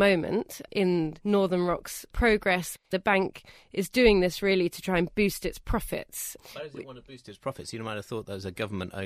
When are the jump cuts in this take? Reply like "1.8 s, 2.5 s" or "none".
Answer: none

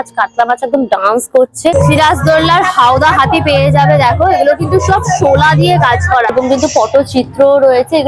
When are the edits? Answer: 1.7 s, 6.3 s

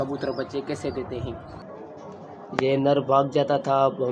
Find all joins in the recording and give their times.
1.8 s

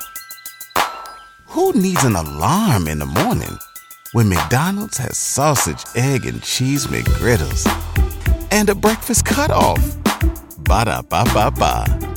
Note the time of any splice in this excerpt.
none

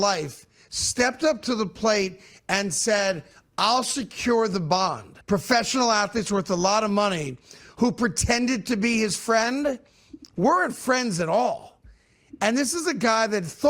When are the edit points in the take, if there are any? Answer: 5.1 s

